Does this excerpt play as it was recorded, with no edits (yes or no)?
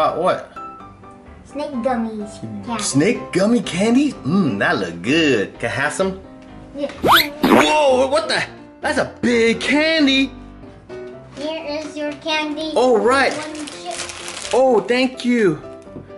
no